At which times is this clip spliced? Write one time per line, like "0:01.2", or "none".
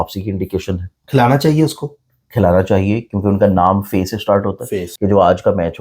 0:04.8